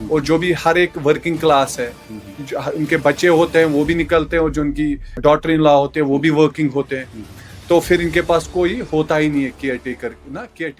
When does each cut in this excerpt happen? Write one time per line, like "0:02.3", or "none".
0:05.2